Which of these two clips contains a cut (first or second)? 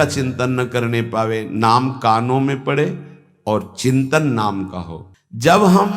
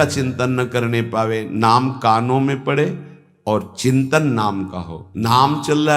second